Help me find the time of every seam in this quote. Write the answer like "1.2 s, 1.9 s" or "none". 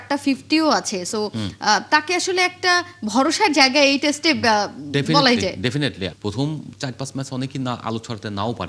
6.1 s